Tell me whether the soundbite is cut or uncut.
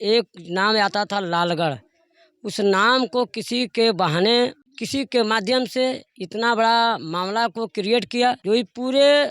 cut